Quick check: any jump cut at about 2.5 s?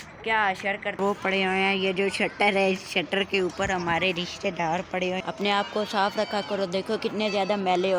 no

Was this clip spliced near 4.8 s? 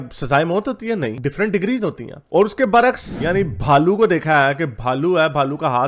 no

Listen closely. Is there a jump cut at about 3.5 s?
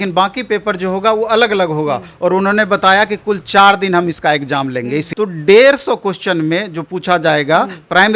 no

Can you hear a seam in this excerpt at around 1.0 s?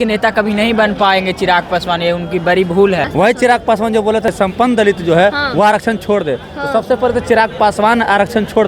no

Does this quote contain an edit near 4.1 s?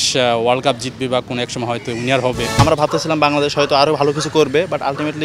no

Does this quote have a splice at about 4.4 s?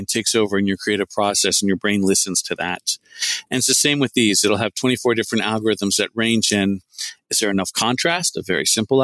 no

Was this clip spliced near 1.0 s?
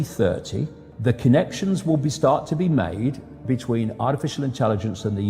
yes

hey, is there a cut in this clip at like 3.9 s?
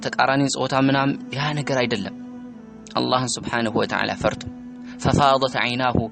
no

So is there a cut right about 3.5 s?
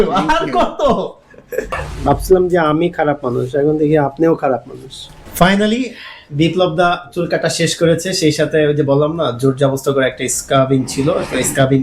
no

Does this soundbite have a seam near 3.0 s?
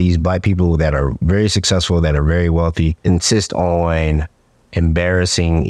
yes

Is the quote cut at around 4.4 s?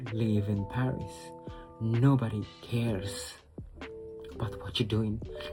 no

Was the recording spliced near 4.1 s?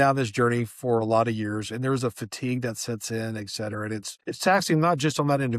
yes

